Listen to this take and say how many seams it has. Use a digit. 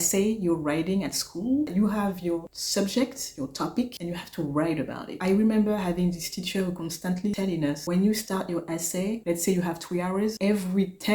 2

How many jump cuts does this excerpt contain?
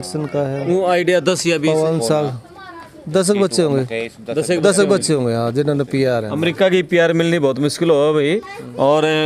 0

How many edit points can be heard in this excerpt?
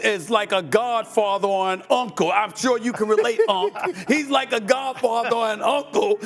0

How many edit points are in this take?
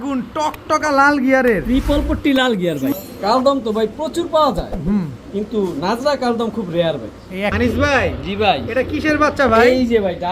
2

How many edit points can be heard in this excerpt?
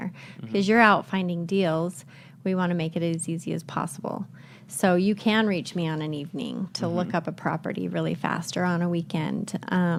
0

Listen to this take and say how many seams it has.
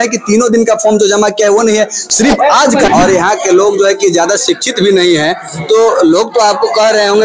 1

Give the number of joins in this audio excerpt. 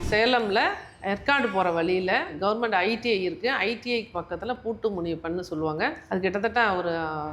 3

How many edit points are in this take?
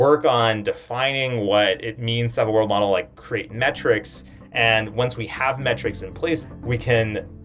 1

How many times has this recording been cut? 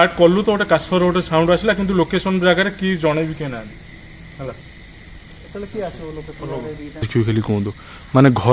1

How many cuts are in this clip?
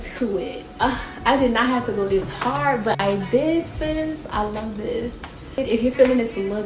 1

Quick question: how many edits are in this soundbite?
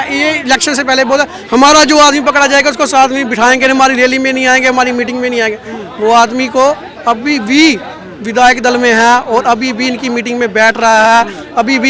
0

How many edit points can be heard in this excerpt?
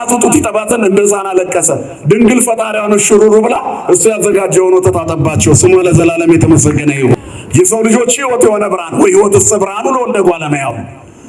1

